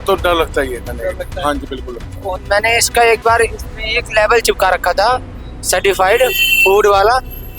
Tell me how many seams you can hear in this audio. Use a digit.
1